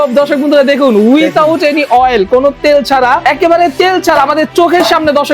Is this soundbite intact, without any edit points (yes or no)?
no